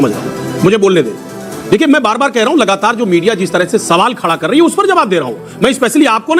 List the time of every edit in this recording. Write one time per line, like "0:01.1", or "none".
none